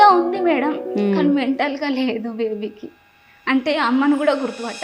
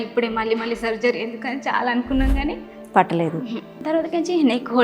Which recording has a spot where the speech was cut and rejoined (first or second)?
second